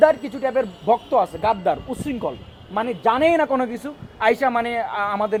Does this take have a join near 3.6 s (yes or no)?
no